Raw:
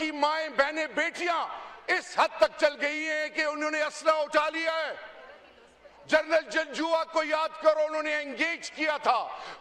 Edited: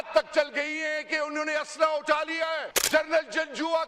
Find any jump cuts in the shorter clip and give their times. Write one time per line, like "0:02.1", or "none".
0:02.7

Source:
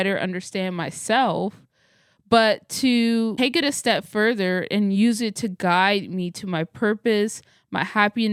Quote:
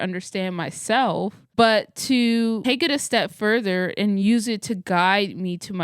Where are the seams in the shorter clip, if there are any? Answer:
0:01.4

